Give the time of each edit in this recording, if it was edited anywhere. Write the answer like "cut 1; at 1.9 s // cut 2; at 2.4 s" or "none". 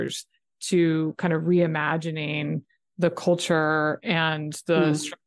none

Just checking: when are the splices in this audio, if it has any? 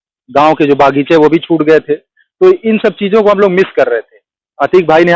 none

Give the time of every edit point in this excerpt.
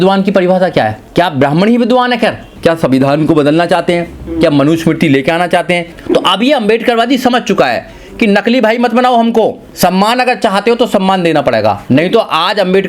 cut 1; at 1.0 s // cut 2; at 2.5 s // cut 3; at 5.9 s // cut 4; at 9.6 s // cut 5; at 11.8 s

